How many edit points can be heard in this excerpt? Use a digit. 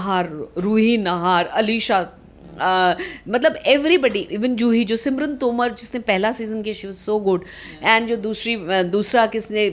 0